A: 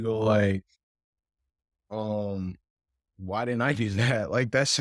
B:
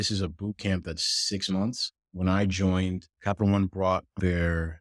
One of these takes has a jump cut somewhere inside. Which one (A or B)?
B